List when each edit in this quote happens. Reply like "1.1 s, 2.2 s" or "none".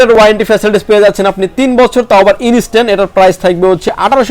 none